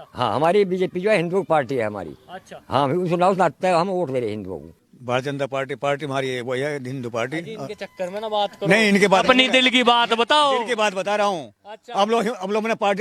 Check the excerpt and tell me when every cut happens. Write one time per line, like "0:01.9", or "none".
0:04.9